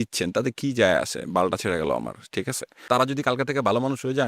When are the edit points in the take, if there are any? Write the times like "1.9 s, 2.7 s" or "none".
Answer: 2.8 s